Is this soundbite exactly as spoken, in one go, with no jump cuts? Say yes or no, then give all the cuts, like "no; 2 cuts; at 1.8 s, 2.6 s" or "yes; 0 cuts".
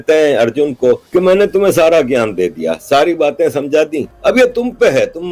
no; 2 cuts; at 1.0 s, 4.1 s